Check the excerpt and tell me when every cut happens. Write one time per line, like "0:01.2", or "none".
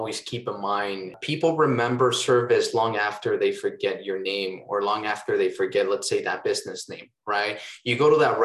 0:01.2